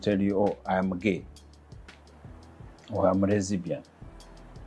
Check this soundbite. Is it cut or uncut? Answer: uncut